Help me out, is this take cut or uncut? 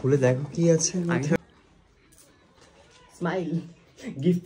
cut